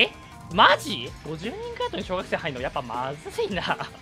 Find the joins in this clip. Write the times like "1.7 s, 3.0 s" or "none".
1.1 s